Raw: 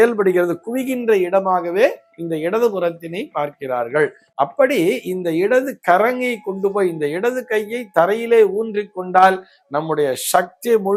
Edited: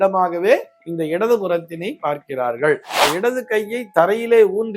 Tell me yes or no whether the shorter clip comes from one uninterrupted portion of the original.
no